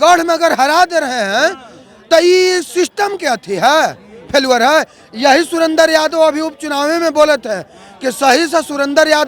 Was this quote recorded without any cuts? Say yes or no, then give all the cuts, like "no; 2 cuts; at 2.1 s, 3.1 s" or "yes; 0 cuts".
yes; 0 cuts